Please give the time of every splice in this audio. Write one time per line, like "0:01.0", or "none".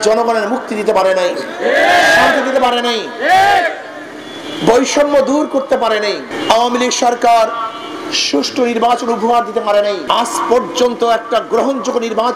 0:06.3
0:10.0

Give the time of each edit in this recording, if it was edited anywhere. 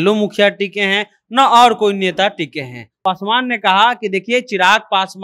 0:02.8

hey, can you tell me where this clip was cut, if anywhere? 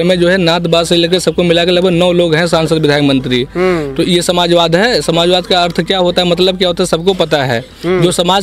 none

